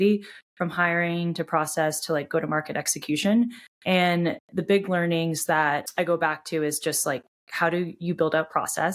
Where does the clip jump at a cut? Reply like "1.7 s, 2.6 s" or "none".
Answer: 5.9 s